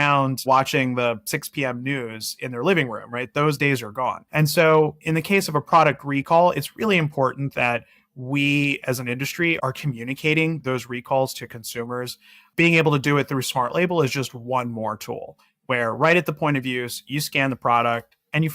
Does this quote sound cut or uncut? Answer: cut